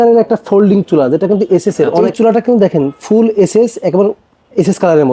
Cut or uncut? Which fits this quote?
cut